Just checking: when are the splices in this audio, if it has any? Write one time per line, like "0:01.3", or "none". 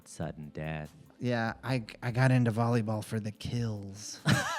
0:01.0